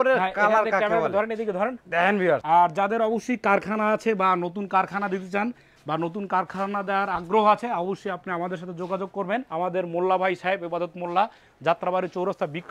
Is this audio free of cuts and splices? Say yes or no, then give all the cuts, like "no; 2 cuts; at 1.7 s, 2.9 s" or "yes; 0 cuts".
yes; 0 cuts